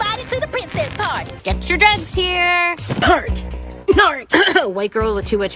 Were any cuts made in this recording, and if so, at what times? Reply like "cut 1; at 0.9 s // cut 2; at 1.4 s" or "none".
none